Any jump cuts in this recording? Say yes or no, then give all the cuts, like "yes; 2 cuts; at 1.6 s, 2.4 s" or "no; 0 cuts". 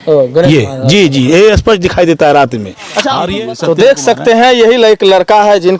yes; 1 cut; at 3.2 s